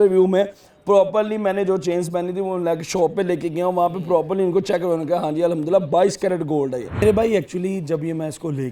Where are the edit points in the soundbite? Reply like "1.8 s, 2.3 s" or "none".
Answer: 7.0 s